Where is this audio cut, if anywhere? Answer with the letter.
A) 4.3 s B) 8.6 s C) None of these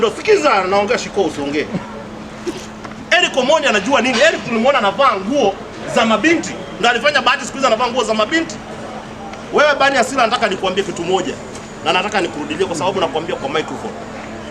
C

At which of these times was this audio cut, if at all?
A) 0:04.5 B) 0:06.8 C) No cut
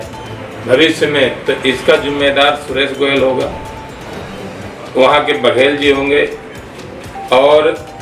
C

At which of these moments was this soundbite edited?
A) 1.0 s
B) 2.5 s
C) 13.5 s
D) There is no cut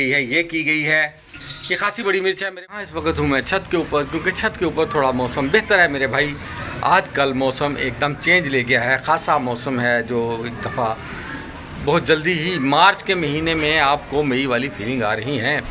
B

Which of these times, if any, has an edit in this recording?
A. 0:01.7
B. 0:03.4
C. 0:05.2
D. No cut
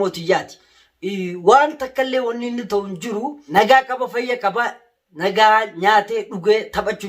B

